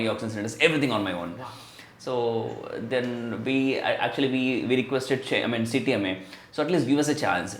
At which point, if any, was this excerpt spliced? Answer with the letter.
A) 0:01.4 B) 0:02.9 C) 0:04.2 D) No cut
D